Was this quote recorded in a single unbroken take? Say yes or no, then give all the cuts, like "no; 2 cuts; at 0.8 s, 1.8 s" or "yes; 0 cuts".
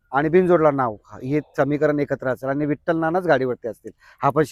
yes; 0 cuts